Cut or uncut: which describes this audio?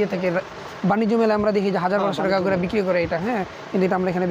uncut